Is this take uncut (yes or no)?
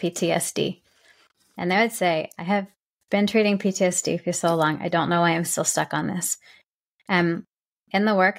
yes